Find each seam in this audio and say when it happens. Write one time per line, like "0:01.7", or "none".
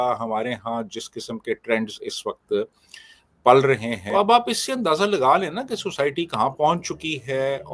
0:04.0